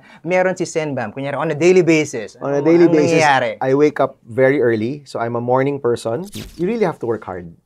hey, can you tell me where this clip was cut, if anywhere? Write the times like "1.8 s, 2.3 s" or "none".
6.4 s